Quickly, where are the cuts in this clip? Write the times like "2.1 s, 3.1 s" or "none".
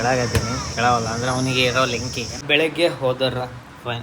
2.3 s